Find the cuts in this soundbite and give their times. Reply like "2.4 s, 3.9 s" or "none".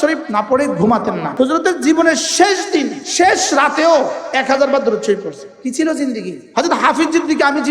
1.2 s, 3.0 s, 5.4 s, 6.3 s